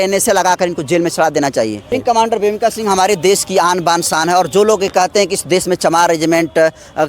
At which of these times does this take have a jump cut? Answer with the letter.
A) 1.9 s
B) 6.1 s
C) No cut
A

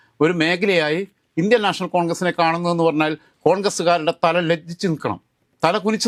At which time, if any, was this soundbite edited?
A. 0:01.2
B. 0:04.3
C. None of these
C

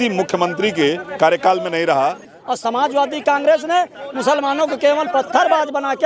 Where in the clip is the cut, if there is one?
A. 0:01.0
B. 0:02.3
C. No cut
B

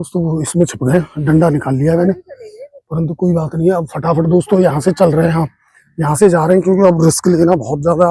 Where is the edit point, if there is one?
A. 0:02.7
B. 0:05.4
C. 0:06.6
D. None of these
D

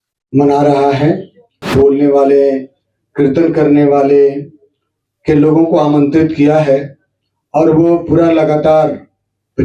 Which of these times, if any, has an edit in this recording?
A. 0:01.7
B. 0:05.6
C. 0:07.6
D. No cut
A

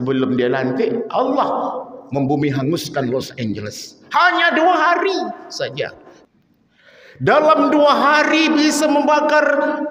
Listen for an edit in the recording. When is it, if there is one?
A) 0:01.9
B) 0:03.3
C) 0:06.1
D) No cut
C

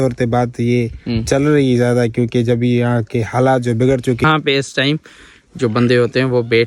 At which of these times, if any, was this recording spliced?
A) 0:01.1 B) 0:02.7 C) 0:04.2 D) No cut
C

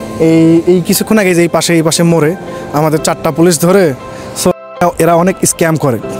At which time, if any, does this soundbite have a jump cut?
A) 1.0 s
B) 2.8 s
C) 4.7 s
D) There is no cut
C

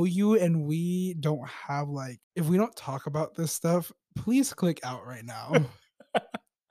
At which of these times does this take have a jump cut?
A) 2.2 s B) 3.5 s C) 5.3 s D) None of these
A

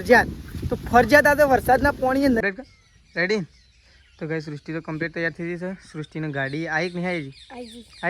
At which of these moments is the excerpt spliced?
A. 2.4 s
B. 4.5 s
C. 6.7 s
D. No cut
A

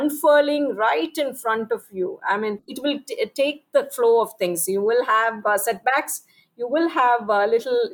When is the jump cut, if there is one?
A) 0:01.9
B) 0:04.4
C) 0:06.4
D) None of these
D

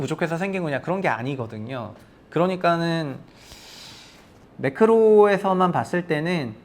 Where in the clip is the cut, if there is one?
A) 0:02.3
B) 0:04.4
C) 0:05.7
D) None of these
B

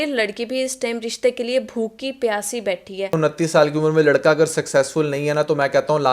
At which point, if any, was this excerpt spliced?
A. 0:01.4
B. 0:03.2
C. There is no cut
B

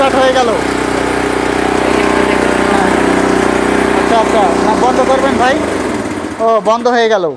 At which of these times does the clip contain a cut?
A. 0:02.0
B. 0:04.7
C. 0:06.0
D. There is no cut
D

